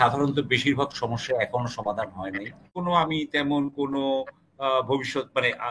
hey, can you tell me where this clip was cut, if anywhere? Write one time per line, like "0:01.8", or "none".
0:02.7